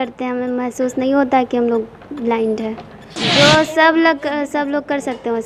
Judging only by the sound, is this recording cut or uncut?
cut